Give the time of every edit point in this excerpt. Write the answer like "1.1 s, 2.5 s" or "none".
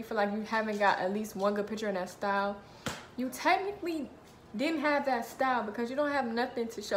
none